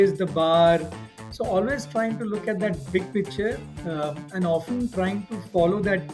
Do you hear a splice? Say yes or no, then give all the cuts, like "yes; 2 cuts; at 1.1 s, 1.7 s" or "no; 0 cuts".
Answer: no; 0 cuts